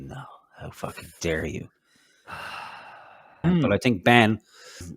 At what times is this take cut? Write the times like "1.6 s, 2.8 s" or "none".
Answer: 3.4 s